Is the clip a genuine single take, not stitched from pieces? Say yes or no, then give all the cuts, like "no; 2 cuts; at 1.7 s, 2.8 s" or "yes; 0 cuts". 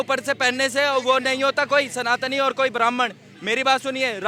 yes; 0 cuts